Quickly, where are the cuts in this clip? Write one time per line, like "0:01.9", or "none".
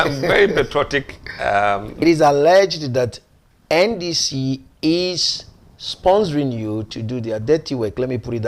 0:02.0